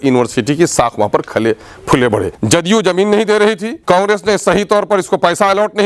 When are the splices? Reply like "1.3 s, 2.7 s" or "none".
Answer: 2.4 s